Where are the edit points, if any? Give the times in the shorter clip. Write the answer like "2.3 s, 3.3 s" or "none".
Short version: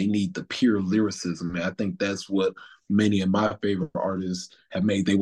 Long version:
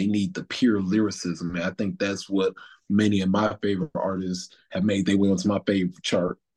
none